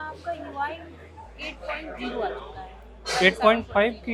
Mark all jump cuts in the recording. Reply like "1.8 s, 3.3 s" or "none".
none